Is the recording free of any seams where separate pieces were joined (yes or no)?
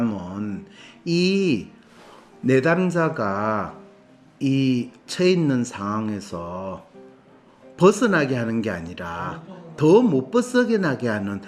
yes